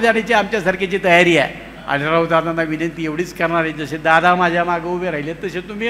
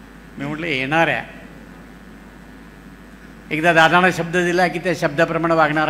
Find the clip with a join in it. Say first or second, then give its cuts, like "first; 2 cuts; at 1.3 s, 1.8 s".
first; 1 cut; at 1.8 s